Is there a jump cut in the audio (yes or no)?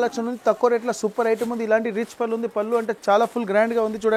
no